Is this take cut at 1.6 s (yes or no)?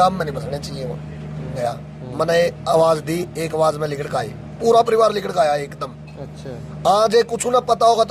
yes